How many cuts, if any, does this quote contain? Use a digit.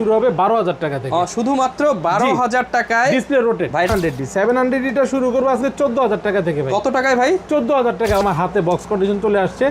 2